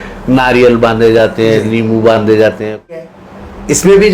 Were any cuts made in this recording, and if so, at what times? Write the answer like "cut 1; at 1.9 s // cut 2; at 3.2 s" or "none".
cut 1; at 3.0 s